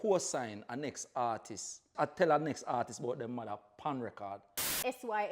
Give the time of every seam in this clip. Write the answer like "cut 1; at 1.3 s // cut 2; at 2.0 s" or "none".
cut 1; at 1.9 s // cut 2; at 4.6 s

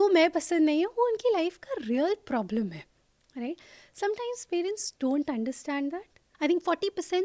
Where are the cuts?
cut 1; at 6.2 s

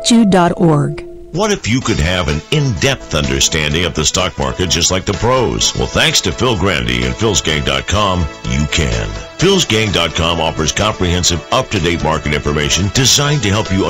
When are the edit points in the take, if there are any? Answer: cut 1; at 1.0 s

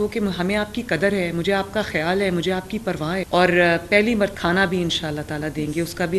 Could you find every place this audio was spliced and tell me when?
cut 1; at 3.2 s // cut 2; at 4.3 s

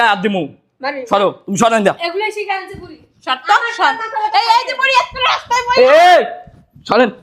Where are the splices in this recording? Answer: none

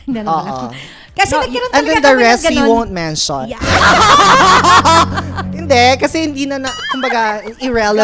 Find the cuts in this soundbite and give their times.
none

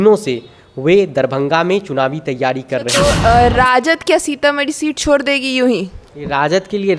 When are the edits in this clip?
cut 1; at 2.9 s

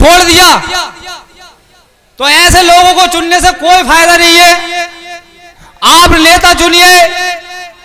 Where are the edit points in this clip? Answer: cut 1; at 2.0 s

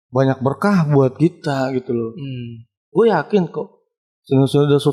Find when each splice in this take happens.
none

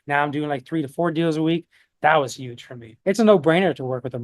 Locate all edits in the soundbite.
cut 1; at 2.8 s

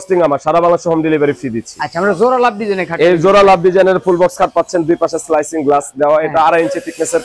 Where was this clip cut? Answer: none

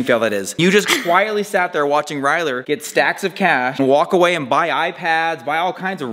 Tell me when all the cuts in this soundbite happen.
none

